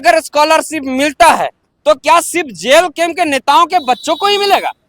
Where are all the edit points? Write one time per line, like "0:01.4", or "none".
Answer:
none